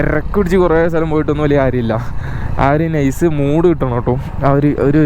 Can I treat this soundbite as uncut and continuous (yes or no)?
yes